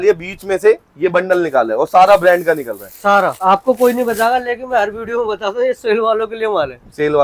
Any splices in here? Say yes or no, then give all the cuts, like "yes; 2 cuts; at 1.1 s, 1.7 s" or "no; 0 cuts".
yes; 1 cut; at 3.4 s